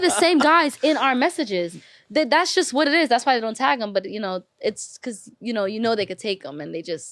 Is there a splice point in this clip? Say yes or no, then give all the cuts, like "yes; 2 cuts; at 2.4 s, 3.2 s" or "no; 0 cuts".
no; 0 cuts